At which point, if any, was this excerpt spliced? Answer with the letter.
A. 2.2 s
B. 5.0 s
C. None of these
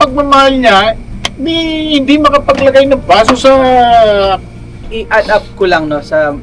B